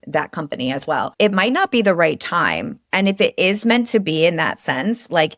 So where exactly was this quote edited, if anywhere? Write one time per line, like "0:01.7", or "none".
0:01.1